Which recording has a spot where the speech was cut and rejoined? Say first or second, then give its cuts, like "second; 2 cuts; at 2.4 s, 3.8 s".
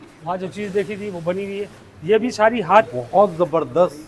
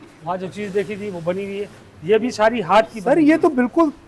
first; 1 cut; at 2.9 s